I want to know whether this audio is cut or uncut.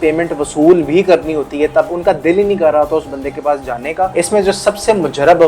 cut